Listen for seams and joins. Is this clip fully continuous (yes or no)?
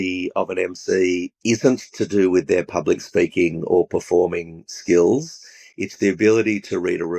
no